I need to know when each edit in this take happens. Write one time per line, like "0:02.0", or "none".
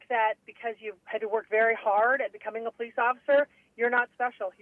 0:00.9